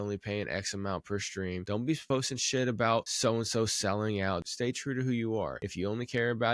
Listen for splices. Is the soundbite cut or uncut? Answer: cut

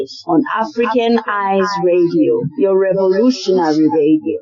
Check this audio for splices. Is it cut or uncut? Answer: uncut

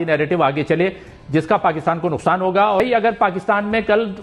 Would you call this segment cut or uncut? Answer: cut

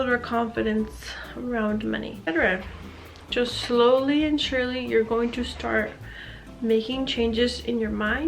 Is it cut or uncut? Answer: cut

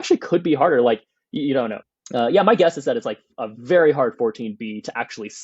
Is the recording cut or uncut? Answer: cut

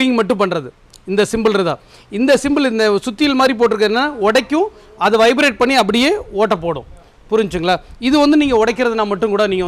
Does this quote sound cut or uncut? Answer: uncut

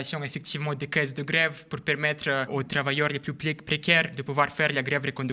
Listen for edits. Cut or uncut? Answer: cut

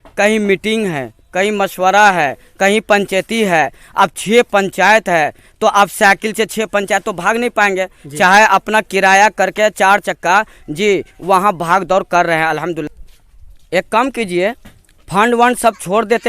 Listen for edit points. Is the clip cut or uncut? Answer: cut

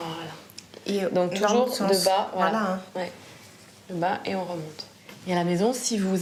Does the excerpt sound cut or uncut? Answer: uncut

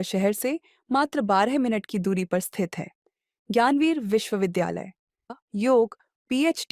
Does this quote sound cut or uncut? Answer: cut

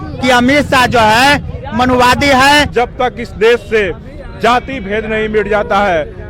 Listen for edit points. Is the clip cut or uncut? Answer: cut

